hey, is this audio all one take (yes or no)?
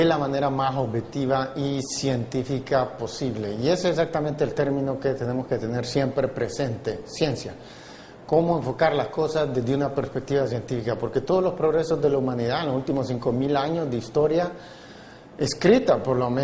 yes